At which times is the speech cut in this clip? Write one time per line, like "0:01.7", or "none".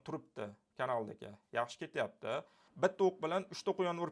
0:02.6